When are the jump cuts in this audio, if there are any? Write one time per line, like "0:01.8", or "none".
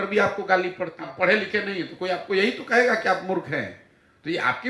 0:01.0